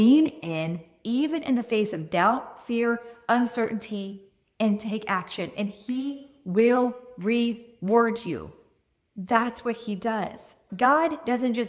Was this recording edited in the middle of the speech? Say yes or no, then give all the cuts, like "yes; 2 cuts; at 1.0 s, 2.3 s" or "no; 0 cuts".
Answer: yes; 1 cut; at 10.6 s